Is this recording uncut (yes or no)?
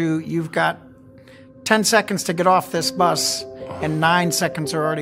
yes